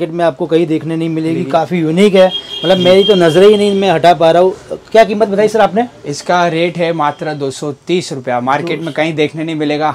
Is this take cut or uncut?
uncut